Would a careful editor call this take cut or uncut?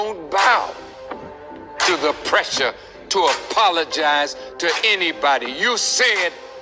uncut